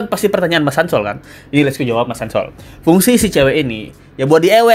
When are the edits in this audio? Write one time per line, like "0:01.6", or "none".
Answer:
none